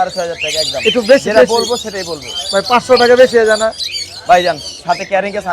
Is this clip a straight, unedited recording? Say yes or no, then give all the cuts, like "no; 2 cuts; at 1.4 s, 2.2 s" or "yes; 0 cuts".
yes; 0 cuts